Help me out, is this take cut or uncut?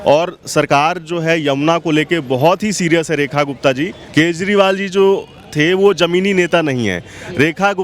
cut